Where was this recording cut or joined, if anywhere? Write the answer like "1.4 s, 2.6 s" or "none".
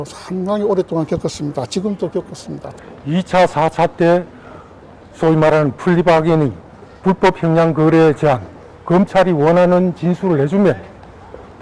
2.7 s